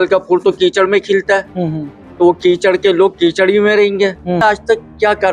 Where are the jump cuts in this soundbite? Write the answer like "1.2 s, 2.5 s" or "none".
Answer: 4.4 s